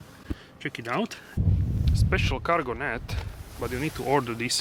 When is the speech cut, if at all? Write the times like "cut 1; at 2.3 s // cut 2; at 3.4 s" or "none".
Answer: none